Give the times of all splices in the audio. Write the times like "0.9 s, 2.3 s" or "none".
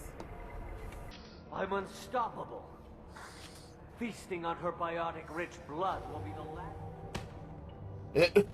1.1 s